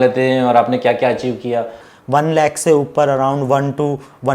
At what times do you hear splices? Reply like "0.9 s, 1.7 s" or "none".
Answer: 1.9 s